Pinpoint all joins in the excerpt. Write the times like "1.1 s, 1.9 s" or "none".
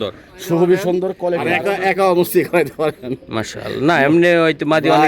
1.6 s

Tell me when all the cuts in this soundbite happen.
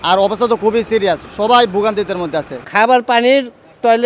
2.6 s

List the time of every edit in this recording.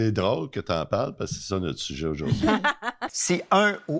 3.0 s

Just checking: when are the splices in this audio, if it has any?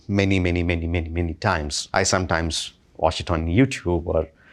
1.8 s

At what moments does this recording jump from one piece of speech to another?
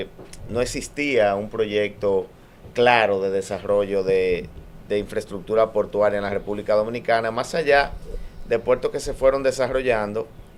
none

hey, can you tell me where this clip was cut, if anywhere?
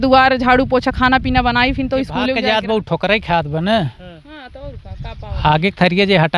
2.3 s

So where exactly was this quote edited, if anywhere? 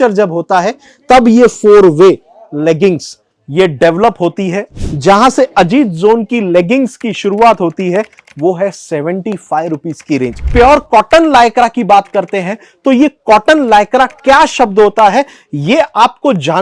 4.7 s, 10.4 s

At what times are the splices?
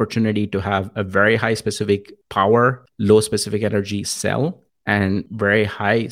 2.2 s, 2.9 s, 5.1 s

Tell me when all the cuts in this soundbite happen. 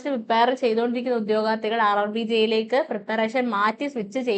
none

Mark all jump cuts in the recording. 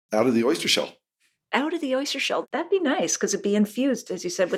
none

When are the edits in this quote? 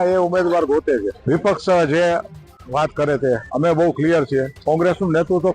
1.1 s, 4.5 s

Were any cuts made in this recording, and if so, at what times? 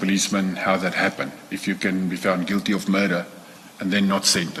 none

